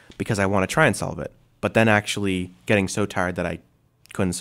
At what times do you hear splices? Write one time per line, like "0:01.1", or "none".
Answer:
none